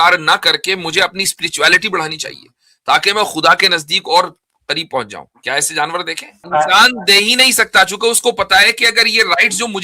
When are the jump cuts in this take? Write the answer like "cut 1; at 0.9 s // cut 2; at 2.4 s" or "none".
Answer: cut 1; at 6.5 s